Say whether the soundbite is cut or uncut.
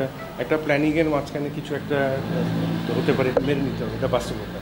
uncut